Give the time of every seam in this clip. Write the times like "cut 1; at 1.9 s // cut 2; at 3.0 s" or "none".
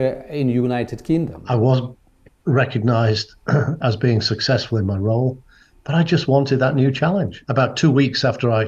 cut 1; at 1.4 s // cut 2; at 7.4 s